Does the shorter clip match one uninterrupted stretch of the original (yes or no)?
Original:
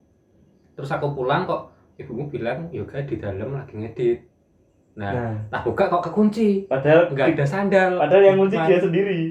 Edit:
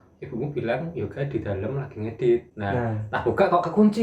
no